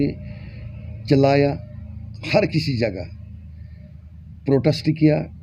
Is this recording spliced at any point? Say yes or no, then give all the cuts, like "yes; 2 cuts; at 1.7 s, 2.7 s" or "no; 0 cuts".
no; 0 cuts